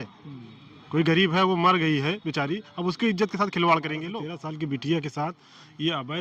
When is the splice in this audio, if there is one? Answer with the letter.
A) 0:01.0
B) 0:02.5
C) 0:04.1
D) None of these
C